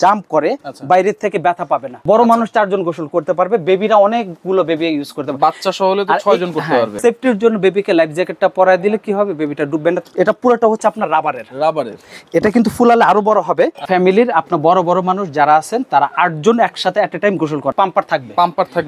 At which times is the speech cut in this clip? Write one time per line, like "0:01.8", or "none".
0:02.0
0:07.0
0:10.0
0:13.8
0:17.7